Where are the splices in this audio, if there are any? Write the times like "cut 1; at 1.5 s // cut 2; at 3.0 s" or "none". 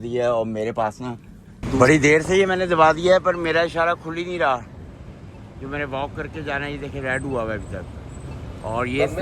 cut 1; at 1.8 s